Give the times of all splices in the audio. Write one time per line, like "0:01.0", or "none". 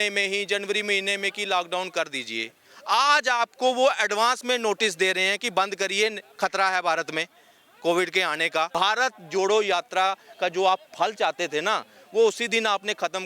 0:08.7